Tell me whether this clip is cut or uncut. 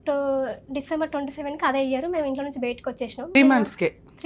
cut